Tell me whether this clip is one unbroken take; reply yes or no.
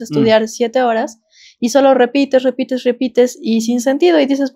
yes